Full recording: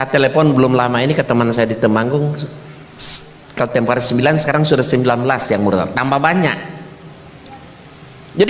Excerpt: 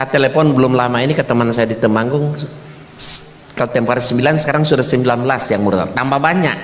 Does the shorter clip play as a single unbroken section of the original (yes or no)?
yes